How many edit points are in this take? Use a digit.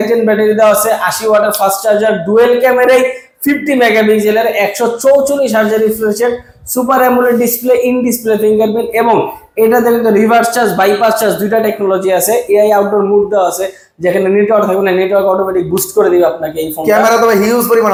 0